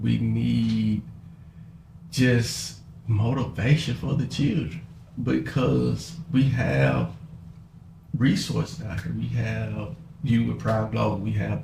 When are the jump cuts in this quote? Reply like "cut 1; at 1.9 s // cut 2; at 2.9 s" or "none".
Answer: none